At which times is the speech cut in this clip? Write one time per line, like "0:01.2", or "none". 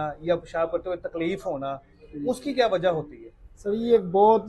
none